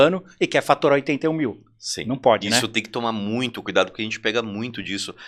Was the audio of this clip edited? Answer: no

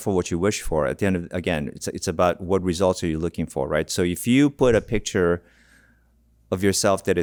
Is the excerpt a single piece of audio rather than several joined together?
yes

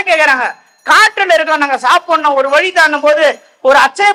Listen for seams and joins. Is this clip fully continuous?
yes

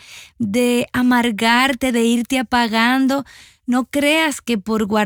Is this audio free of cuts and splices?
yes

